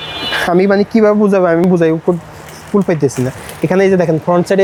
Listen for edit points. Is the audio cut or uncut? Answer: uncut